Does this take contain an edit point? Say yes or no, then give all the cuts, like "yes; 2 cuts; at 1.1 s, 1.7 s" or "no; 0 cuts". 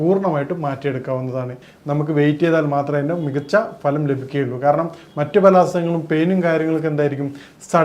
yes; 1 cut; at 1.6 s